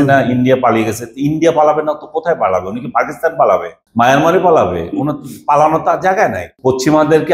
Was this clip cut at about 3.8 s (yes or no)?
yes